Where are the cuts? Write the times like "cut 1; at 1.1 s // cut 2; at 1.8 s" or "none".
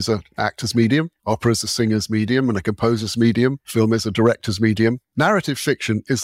none